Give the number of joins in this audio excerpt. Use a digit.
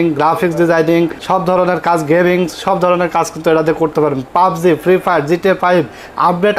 1